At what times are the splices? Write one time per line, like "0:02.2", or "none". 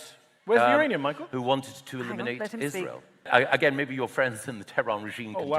0:03.3